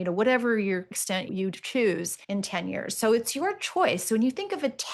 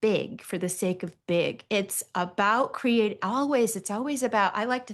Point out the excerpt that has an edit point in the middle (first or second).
first